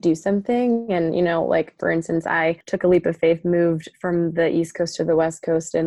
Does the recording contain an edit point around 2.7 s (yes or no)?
yes